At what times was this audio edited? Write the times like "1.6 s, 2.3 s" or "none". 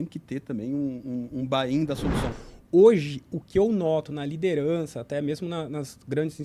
2.3 s